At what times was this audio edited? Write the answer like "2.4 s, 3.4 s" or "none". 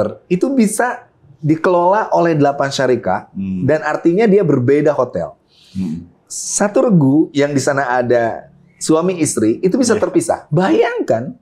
10.4 s